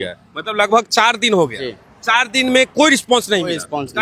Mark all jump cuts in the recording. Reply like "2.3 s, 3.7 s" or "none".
none